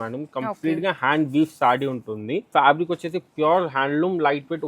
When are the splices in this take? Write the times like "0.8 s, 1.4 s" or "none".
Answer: 2.5 s

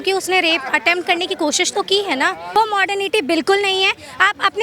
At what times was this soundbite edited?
2.5 s

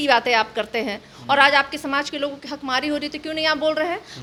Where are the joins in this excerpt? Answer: none

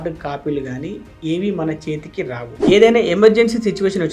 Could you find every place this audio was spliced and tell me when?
2.5 s

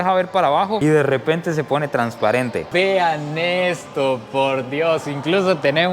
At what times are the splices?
2.6 s

